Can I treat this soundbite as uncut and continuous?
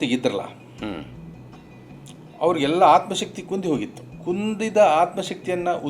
no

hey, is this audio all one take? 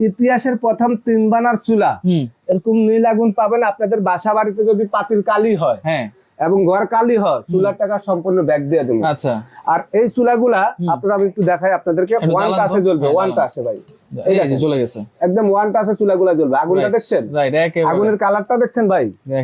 yes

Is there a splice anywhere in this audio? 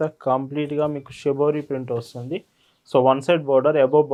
no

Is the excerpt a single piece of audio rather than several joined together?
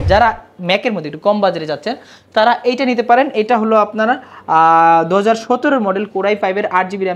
yes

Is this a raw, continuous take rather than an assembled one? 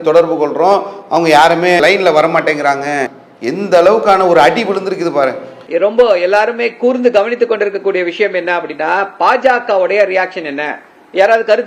no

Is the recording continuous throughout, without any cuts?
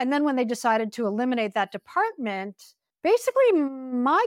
yes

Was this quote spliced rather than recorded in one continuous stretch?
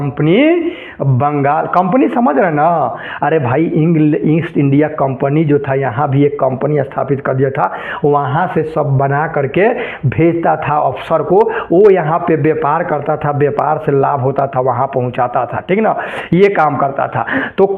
no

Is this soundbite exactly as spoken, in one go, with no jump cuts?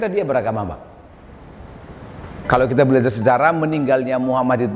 no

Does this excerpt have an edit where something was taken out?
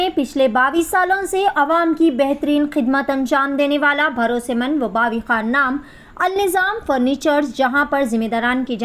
no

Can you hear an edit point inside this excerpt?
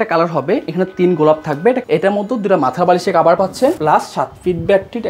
yes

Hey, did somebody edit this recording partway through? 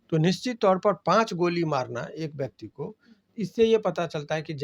no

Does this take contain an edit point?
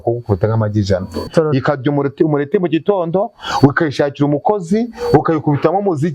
yes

